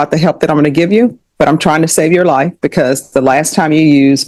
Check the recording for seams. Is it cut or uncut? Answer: uncut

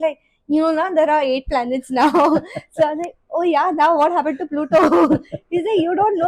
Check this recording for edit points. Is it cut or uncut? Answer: uncut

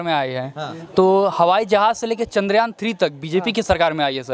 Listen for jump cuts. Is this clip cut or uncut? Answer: uncut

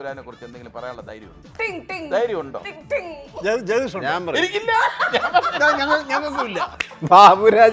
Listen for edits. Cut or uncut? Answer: cut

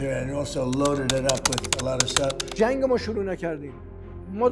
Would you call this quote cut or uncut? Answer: cut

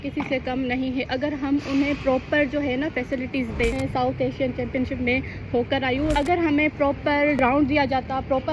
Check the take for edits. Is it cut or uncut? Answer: cut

